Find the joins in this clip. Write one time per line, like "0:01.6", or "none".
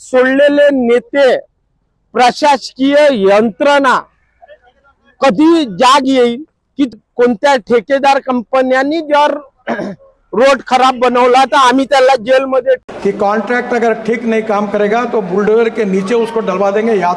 0:06.9
0:12.8